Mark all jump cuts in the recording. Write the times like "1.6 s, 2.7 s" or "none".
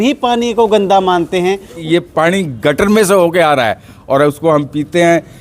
1.8 s